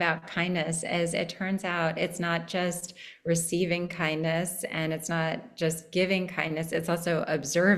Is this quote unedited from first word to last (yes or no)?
yes